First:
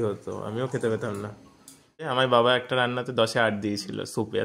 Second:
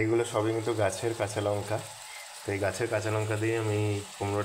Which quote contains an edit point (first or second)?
first